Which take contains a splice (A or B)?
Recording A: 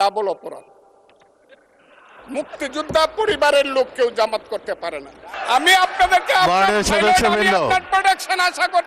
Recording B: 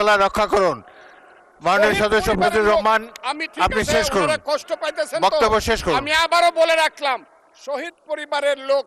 A